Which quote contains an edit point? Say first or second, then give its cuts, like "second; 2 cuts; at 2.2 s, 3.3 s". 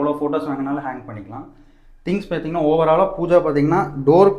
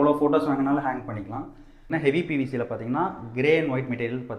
second; 1 cut; at 1.9 s